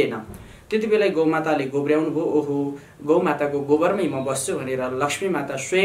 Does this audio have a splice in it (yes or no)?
no